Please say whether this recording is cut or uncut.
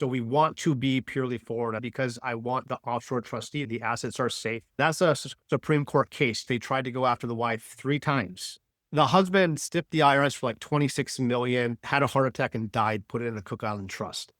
cut